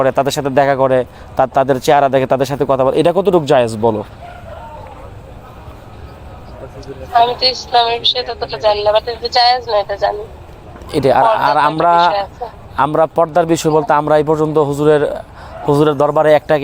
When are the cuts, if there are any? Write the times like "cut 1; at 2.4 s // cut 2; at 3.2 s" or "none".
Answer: none